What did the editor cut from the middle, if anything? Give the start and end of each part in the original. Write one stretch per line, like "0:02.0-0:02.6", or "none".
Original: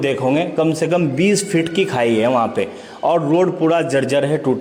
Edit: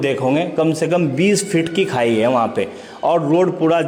none